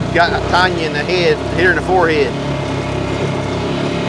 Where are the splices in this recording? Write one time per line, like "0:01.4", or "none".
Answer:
none